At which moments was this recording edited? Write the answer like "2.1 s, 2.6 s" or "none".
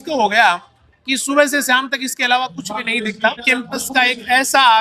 3.4 s